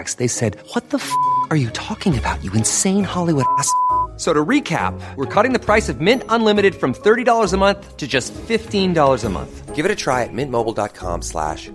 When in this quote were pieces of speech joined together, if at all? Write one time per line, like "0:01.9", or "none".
none